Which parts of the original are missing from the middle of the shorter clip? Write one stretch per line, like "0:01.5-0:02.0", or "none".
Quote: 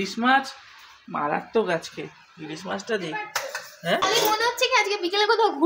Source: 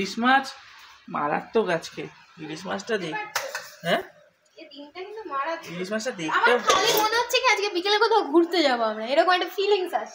0:04.0-0:06.7